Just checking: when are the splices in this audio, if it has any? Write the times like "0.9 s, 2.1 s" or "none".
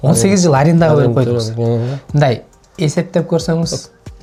none